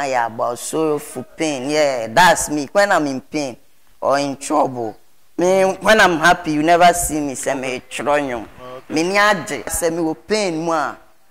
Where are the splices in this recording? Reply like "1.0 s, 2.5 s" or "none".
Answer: 9.7 s